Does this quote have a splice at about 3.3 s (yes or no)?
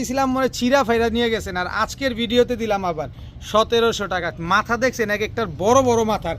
no